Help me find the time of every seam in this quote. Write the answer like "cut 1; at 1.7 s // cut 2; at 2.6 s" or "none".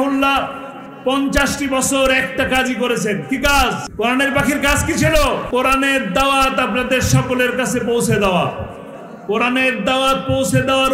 cut 1; at 3.8 s // cut 2; at 5.4 s